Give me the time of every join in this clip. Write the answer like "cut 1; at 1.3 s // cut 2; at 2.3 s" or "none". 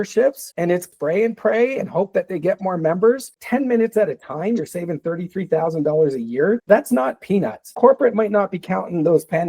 cut 1; at 0.9 s // cut 2; at 3.4 s // cut 3; at 7.7 s

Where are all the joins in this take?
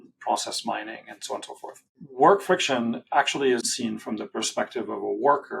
cut 1; at 3.7 s

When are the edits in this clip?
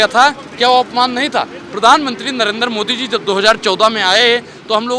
none

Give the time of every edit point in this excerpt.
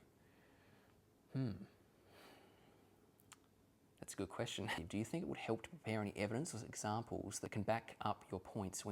cut 1; at 4.8 s // cut 2; at 7.4 s

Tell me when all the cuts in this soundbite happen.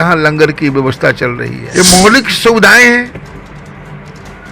cut 1; at 1.5 s

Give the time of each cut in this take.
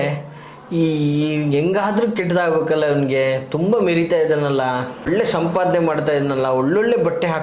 cut 1; at 5.1 s

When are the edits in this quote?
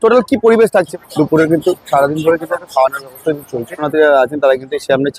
cut 1; at 0.9 s // cut 2; at 3.8 s

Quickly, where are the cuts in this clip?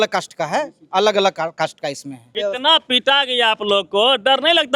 cut 1; at 2.2 s

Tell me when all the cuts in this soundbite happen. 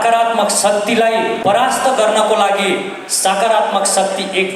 cut 1; at 1.4 s

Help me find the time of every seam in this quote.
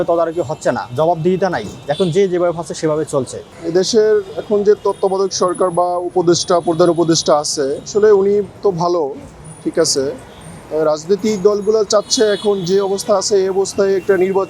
none

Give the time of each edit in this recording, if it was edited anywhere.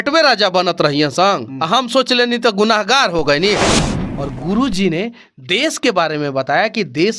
cut 1; at 3.7 s

